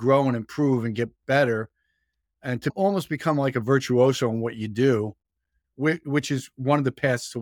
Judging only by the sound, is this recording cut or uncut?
cut